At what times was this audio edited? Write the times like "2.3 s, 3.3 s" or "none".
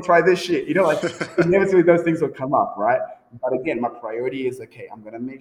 none